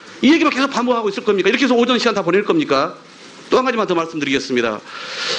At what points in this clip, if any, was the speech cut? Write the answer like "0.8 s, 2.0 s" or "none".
3.7 s